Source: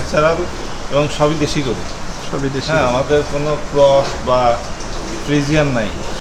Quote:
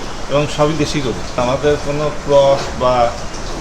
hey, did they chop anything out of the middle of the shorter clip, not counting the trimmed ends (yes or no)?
yes